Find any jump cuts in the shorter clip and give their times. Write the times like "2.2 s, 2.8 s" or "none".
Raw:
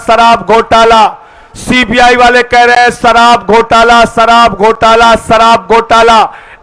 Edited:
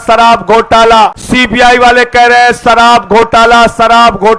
1.2 s